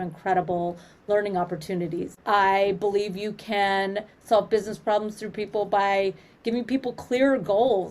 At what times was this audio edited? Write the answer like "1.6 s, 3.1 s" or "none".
2.1 s